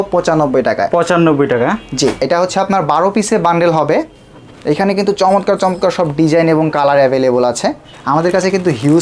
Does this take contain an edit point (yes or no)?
yes